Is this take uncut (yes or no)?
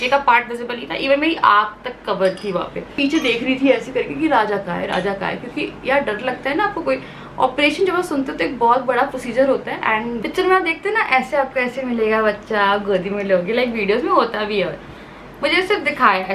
no